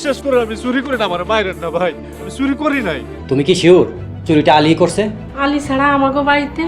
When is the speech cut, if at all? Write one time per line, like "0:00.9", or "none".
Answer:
0:03.1
0:05.2